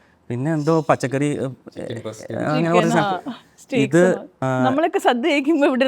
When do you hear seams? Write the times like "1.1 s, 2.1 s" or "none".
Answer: 4.4 s